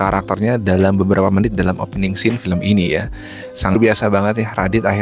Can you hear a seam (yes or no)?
yes